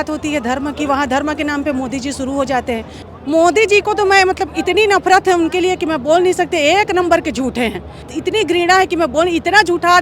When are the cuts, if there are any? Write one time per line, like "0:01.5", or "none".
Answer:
0:03.0
0:08.1